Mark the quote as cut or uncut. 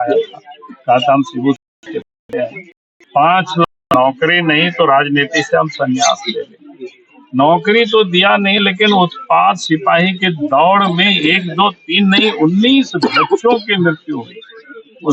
uncut